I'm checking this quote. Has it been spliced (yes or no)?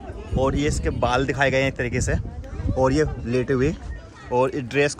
no